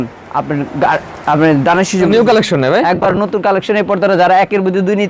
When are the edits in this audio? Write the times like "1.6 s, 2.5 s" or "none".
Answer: 2.1 s